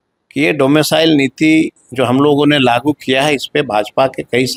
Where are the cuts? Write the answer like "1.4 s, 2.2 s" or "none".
none